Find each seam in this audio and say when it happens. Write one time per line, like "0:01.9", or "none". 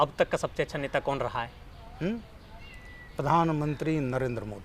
none